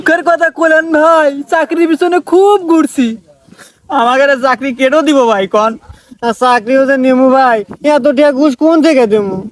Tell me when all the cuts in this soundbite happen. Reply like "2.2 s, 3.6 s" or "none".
none

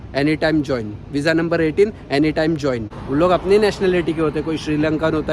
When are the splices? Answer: 2.9 s

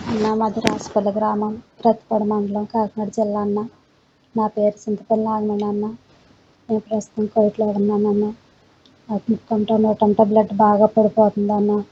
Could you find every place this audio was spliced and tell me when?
none

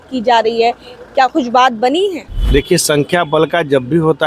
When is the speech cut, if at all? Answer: 2.3 s

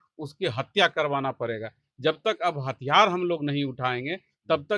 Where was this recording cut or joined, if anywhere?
none

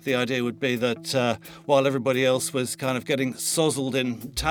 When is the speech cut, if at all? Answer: none

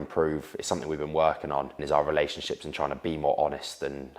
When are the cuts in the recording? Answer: 1.8 s

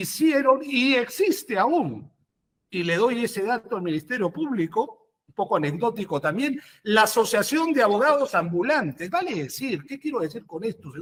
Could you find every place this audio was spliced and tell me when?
none

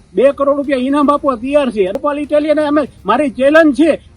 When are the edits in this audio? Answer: 2.0 s

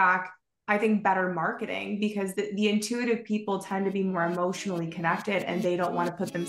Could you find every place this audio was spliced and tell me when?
2.3 s

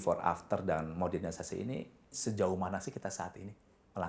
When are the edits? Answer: 2.2 s

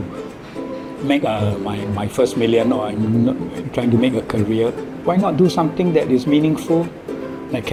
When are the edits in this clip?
none

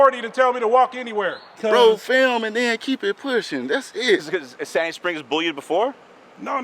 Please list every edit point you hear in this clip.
1.4 s, 4.3 s

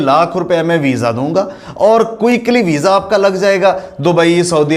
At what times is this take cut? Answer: none

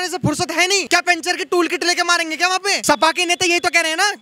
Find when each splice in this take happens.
0.8 s, 2.8 s

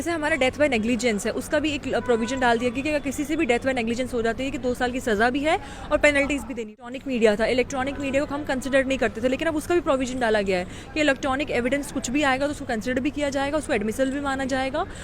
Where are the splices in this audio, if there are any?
6.7 s

